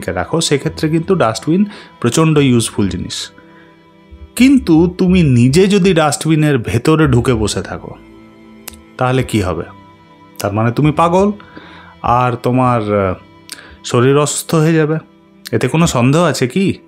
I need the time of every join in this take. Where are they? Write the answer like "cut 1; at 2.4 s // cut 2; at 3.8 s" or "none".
none